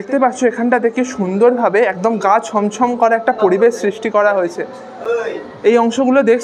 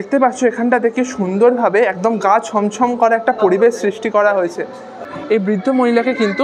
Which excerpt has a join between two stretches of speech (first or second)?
second